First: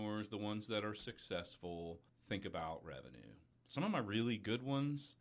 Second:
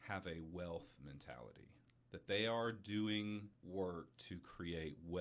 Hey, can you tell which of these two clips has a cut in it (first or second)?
first